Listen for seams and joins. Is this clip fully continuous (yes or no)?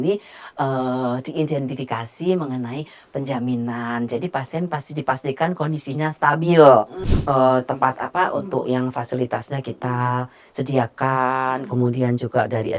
no